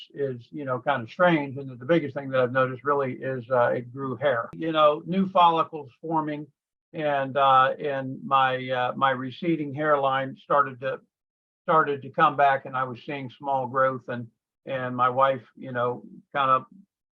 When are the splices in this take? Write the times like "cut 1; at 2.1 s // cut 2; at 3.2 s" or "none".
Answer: cut 1; at 4.5 s